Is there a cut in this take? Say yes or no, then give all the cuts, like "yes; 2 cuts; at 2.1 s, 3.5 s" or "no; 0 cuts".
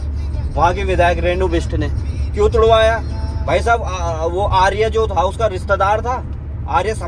no; 0 cuts